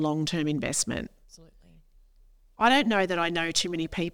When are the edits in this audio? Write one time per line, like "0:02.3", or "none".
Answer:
none